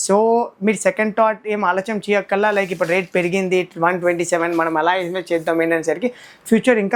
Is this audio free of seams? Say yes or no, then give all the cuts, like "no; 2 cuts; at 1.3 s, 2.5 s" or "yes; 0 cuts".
yes; 0 cuts